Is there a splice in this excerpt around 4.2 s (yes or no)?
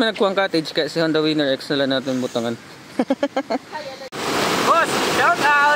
yes